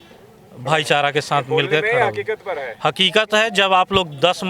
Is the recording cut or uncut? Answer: uncut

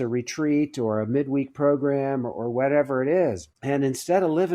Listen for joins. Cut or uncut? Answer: cut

